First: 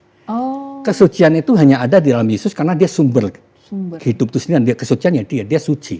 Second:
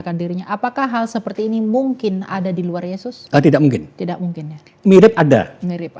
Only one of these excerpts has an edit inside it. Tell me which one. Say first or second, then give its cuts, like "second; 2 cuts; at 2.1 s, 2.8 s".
second; 2 cuts; at 3.1 s, 4.7 s